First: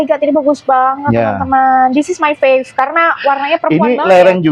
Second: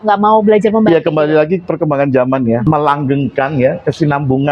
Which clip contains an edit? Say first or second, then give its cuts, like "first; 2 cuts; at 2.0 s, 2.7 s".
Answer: second; 1 cut; at 2.6 s